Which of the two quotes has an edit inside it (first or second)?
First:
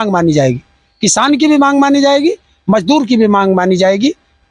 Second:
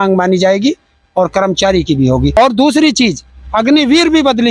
second